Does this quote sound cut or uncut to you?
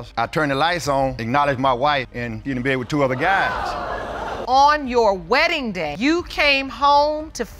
uncut